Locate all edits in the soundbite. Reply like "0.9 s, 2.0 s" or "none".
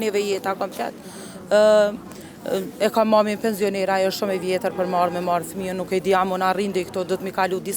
none